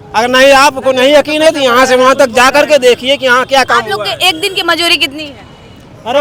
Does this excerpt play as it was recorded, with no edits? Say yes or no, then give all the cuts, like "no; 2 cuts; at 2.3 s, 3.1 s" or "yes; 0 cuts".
yes; 0 cuts